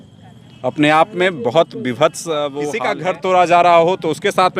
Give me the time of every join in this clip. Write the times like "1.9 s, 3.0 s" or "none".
2.9 s